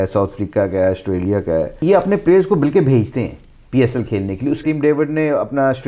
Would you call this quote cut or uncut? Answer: cut